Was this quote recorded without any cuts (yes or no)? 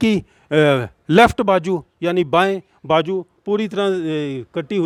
yes